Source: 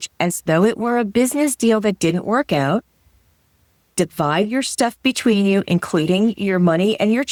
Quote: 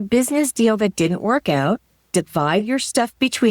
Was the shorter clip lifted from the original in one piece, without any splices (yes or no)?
no